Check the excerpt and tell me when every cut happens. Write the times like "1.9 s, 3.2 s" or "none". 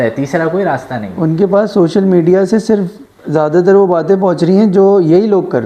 1.0 s